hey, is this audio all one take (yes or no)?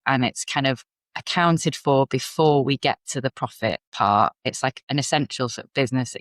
no